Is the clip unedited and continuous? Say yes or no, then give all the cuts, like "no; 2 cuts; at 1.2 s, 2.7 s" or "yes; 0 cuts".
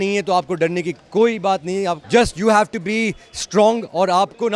no; 1 cut; at 2.0 s